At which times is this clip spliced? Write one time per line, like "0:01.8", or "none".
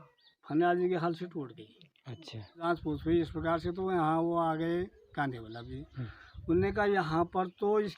0:02.7